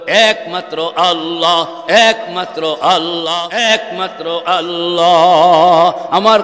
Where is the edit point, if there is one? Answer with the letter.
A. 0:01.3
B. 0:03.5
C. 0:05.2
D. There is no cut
B